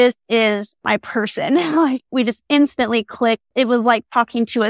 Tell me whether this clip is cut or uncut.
cut